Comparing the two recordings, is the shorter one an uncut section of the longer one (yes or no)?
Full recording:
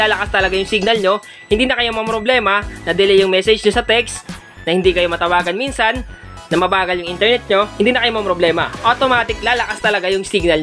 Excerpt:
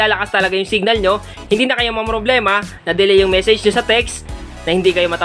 yes